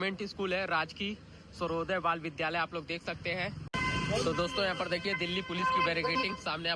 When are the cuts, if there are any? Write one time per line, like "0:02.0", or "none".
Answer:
0:03.6